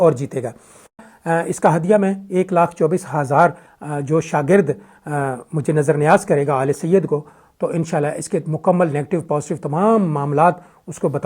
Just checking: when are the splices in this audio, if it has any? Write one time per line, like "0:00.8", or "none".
0:00.9
0:03.7